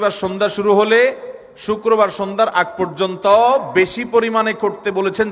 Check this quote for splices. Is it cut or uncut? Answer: uncut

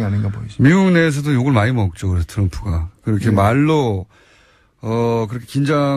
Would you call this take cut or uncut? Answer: uncut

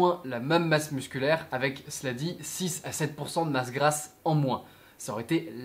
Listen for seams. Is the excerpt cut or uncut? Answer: uncut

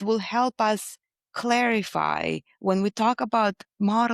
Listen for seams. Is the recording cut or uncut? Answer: uncut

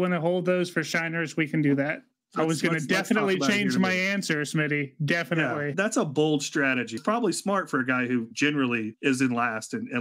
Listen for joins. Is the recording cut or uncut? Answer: cut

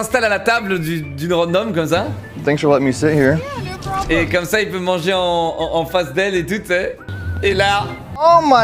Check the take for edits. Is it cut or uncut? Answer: uncut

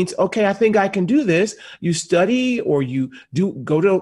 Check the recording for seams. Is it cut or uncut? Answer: uncut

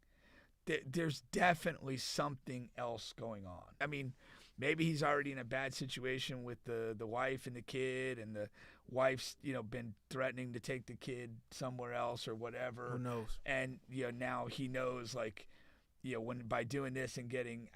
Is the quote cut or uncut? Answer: cut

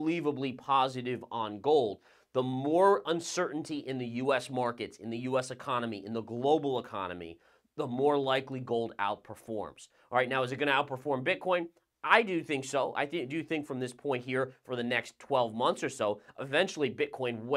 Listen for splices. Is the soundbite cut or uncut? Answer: uncut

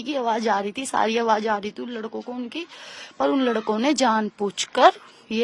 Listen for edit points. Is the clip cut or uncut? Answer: uncut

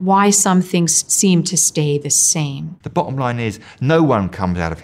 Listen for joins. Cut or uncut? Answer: cut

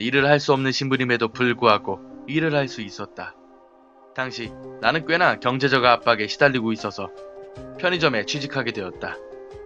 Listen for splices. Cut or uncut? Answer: uncut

